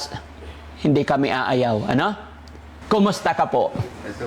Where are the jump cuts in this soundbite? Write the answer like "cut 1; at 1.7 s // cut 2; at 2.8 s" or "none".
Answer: cut 1; at 2.7 s